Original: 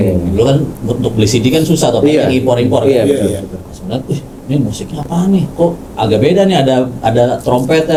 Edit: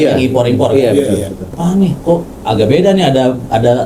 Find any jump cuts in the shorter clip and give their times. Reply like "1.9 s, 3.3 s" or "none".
1.4 s